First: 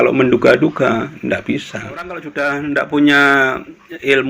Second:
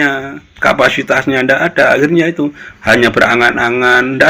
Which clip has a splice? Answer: first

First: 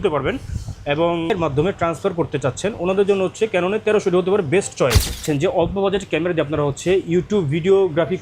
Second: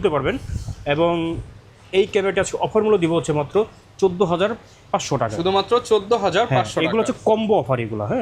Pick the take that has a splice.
first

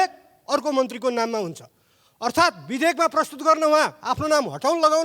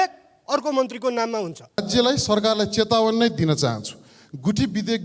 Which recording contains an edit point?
second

